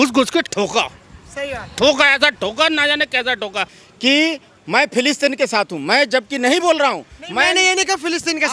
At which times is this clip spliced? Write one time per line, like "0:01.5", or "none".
0:03.8